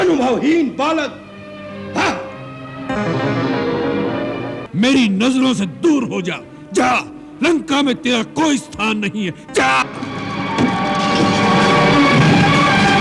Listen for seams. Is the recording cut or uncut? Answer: cut